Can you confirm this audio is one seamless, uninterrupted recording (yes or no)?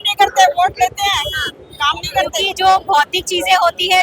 no